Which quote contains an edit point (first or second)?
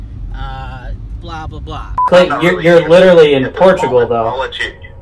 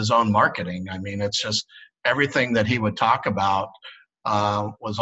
first